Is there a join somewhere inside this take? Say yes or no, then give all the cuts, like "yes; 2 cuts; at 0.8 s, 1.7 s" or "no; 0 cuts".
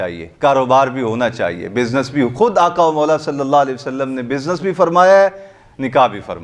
no; 0 cuts